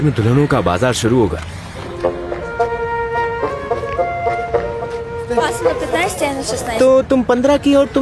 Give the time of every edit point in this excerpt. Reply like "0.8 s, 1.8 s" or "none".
none